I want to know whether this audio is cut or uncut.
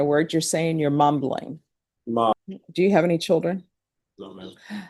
cut